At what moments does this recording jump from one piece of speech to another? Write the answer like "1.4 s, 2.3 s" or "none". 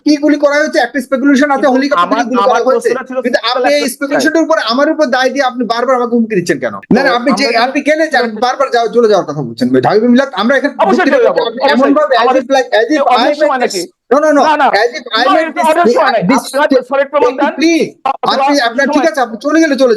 6.7 s